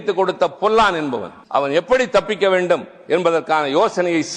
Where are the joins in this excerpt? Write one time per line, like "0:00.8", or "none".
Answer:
0:01.3